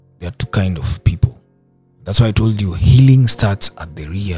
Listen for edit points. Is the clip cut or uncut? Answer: uncut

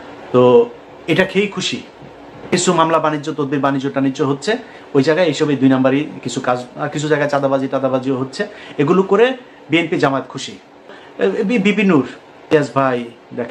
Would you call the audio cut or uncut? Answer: cut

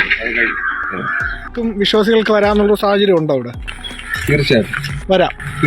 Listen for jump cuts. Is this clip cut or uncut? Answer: cut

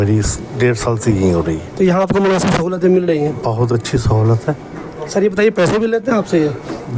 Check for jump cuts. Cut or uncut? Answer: uncut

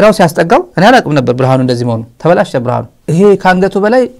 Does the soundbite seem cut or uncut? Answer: cut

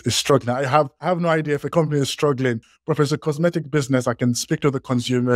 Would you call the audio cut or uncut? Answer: cut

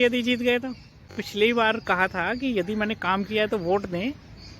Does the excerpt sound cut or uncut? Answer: cut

